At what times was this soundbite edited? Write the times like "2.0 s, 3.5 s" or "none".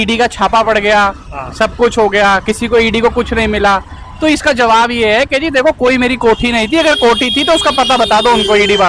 none